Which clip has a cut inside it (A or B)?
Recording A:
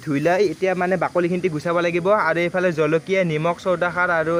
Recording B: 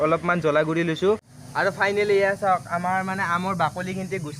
B